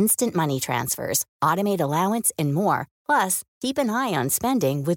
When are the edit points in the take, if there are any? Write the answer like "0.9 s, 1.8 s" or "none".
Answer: none